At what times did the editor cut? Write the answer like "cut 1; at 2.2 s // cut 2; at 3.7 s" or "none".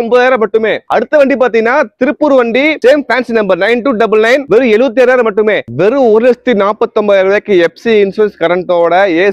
cut 1; at 4.4 s // cut 2; at 5.6 s